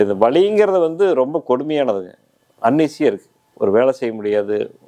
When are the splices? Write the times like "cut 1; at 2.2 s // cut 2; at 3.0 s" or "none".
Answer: none